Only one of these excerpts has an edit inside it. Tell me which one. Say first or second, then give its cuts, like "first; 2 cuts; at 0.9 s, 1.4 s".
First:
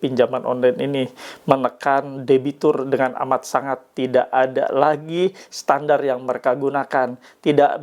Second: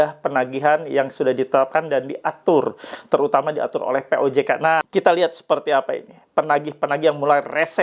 second; 1 cut; at 4.9 s